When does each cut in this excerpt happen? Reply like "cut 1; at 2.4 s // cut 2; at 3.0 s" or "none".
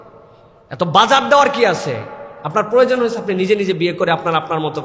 none